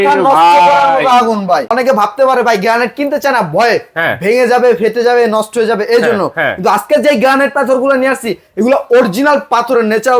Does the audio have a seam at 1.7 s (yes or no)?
yes